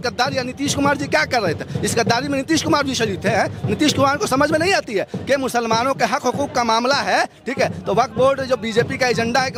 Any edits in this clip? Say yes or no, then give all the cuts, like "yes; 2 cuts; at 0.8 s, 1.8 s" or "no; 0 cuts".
no; 0 cuts